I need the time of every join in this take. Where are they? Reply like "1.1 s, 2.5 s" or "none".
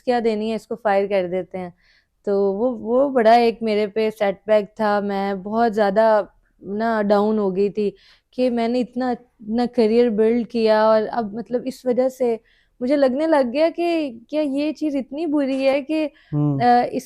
none